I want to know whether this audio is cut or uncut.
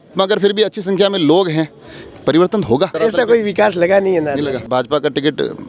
cut